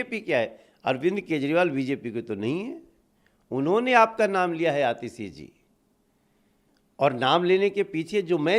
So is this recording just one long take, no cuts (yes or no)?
yes